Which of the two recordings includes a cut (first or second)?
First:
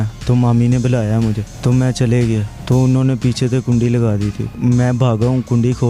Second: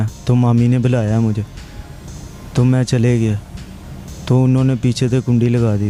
first